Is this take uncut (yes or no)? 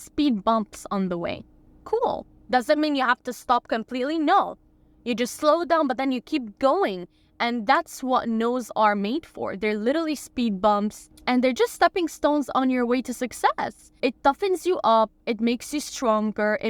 yes